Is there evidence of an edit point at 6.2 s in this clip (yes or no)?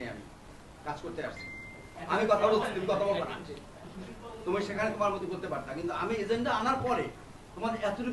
no